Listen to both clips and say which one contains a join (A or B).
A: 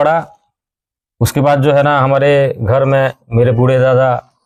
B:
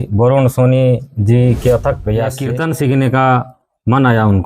B